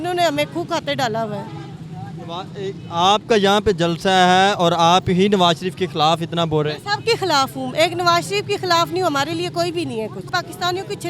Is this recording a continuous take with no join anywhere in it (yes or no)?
yes